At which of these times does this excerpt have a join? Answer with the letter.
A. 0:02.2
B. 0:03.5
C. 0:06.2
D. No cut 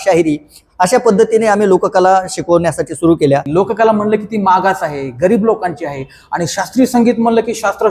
B